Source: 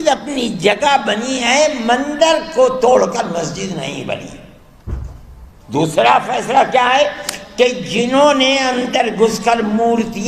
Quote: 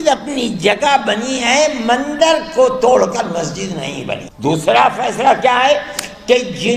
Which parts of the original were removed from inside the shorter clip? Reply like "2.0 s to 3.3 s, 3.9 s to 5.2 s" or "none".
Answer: 4.2 s to 5.5 s